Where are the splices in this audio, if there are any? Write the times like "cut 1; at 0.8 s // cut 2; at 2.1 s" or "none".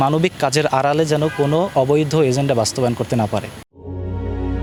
none